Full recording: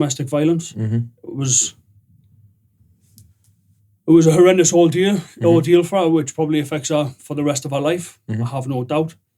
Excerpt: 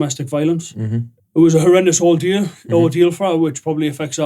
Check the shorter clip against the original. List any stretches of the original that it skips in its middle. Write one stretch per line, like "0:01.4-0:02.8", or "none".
0:01.2-0:03.9